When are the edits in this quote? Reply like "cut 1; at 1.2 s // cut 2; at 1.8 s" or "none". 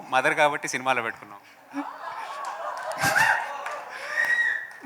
none